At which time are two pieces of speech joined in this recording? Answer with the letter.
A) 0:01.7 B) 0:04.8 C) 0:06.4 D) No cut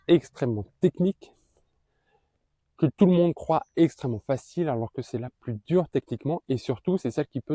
D